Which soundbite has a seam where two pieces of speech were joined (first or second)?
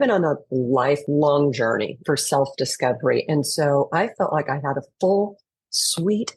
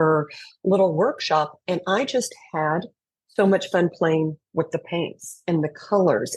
first